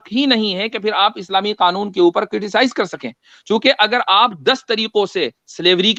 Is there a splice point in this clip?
no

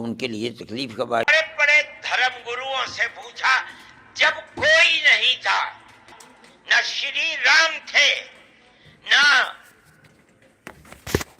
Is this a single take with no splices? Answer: no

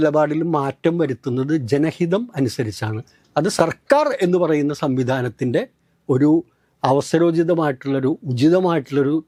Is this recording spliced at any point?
no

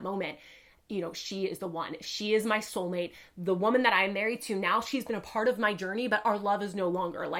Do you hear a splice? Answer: no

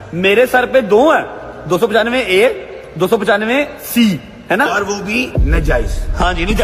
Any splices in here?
no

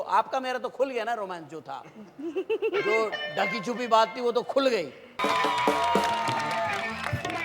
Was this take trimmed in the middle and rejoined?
yes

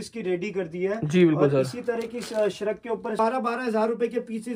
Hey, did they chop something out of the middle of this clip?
yes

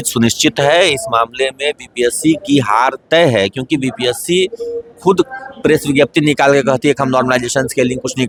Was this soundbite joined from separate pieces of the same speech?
no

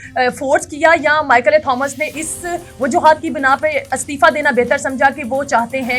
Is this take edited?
no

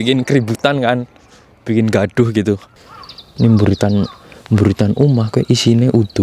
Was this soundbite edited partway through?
yes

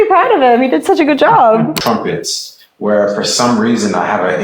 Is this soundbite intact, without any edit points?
no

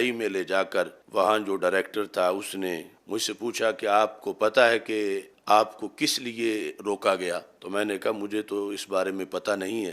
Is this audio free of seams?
no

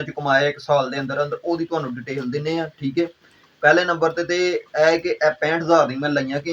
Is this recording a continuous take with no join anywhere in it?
yes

